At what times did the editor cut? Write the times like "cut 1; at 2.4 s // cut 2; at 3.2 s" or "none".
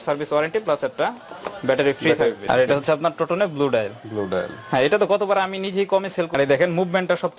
cut 1; at 2.5 s // cut 2; at 6.3 s